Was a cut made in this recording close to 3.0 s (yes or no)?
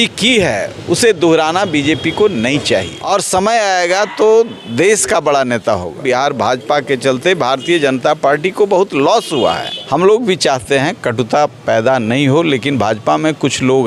yes